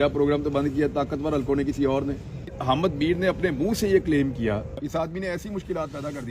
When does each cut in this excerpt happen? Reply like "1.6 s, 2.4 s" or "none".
2.6 s, 4.7 s